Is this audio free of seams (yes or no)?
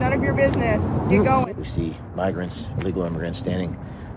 no